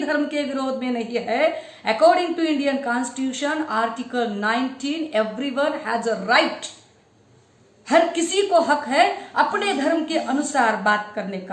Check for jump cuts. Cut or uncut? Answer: uncut